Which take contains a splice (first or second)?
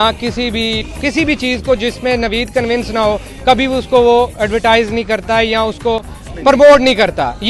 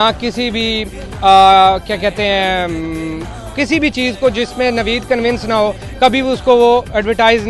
first